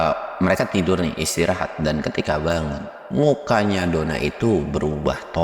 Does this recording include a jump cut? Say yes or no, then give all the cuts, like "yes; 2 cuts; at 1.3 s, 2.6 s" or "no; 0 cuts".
no; 0 cuts